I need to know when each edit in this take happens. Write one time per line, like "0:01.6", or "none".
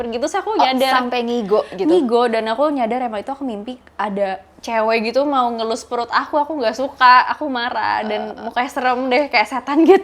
none